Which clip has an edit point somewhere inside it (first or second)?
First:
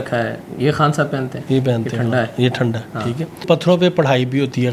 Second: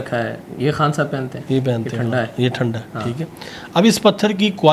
first